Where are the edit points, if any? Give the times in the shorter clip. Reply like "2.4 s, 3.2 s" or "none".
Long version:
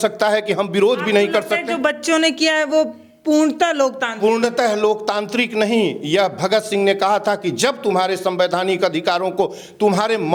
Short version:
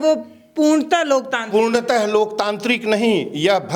none